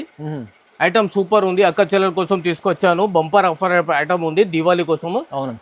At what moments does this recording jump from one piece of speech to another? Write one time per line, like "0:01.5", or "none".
none

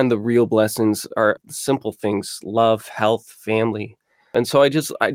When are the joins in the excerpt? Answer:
0:01.4
0:04.3

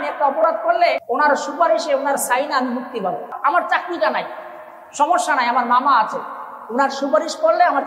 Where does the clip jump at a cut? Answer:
0:01.0
0:03.4

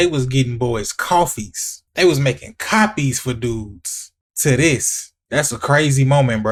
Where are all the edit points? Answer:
none

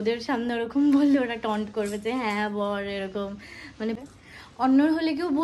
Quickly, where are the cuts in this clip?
0:04.0

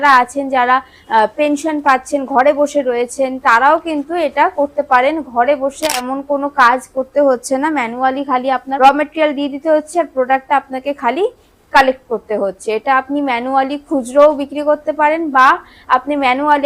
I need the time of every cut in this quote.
0:06.0
0:08.7

